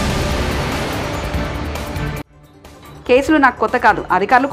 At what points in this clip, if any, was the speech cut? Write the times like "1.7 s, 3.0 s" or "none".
none